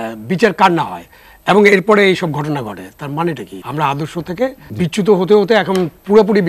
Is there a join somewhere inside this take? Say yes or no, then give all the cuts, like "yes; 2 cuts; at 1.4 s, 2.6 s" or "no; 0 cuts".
yes; 2 cuts; at 3.5 s, 4.6 s